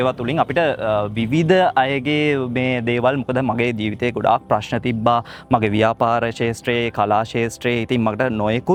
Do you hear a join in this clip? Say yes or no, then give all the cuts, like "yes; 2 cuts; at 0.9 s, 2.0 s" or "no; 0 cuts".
no; 0 cuts